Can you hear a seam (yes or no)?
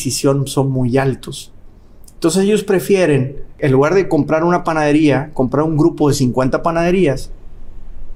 no